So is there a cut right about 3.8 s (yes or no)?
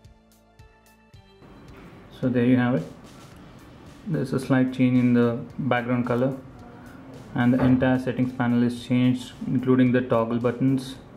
no